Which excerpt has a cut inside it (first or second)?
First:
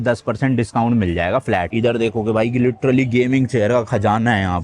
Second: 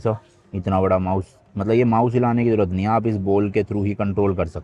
first